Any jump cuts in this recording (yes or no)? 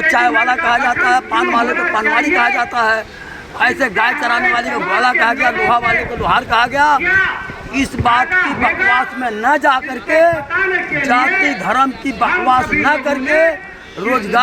no